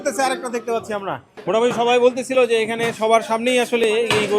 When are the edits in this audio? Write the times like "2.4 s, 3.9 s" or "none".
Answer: none